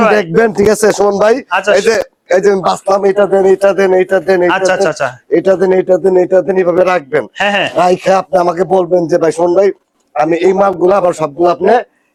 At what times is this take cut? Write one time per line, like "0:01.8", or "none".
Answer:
none